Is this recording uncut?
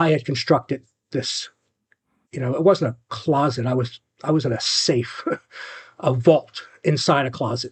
yes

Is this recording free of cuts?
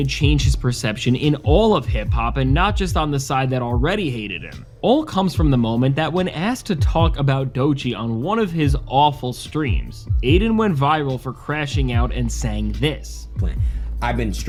yes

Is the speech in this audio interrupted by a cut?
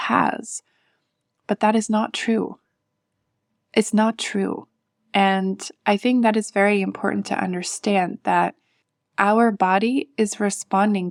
no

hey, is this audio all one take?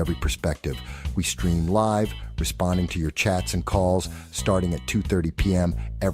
no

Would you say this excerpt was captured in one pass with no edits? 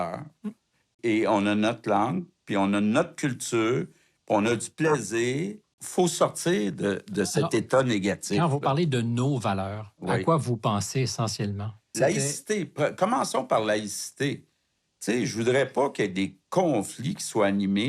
no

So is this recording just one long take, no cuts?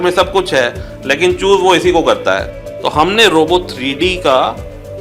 no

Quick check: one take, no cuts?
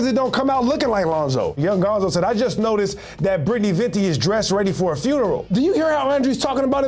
no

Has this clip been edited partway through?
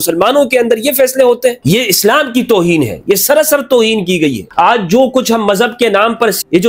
yes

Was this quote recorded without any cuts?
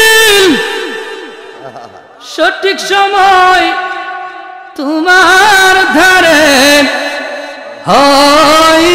yes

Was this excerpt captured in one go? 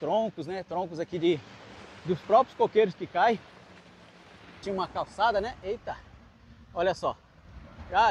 no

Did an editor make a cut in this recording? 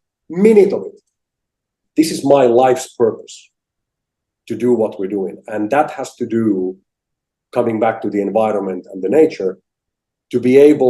yes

